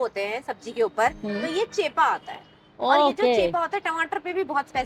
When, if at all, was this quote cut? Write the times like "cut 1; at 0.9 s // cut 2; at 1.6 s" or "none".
none